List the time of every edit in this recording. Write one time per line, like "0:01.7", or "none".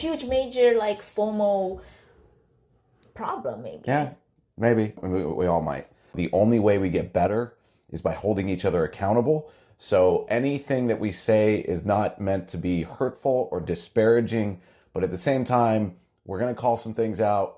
0:06.2